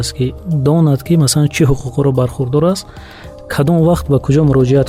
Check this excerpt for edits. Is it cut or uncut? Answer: uncut